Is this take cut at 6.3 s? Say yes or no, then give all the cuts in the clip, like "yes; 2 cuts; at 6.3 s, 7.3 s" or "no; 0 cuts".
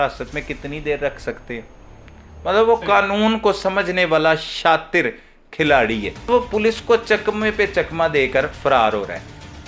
yes; 1 cut; at 6.3 s